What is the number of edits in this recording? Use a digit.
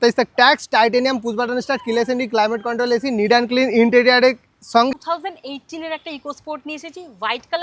1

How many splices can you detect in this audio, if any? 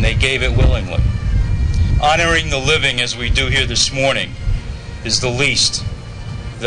1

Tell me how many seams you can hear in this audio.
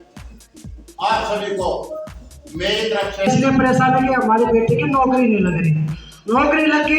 1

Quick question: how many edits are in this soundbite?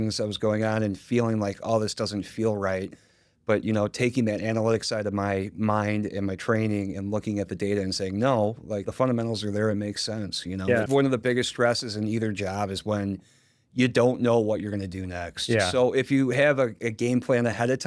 2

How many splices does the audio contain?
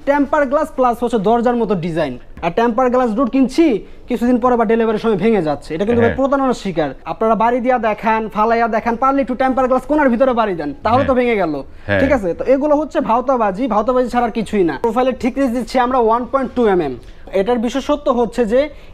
4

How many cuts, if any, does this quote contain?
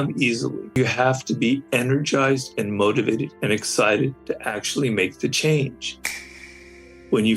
4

